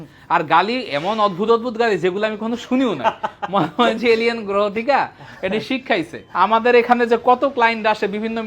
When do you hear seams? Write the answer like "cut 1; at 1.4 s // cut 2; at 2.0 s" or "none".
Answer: cut 1; at 6.2 s